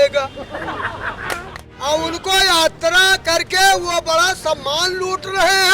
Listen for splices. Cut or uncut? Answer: cut